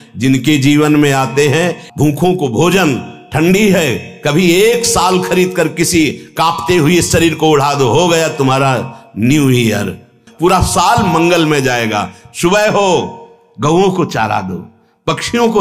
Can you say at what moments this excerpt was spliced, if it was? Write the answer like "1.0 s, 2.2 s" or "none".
1.8 s, 10.2 s